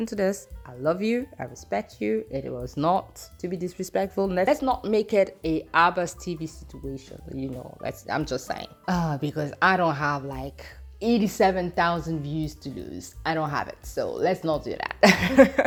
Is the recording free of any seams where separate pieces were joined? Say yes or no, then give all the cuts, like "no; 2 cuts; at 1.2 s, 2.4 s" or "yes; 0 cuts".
yes; 0 cuts